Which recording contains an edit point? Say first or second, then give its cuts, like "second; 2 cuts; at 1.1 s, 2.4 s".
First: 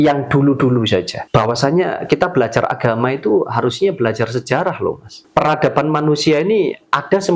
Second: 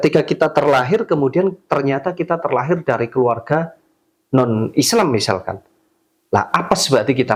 first; 2 cuts; at 1.2 s, 5.1 s